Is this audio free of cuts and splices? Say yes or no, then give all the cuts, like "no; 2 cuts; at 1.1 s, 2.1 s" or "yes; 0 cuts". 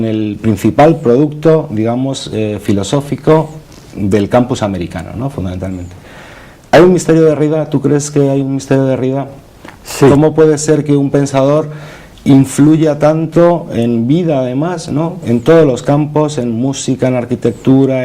no; 1 cut; at 5.6 s